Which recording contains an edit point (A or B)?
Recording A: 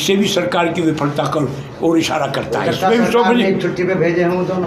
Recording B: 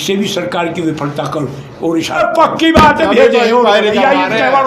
B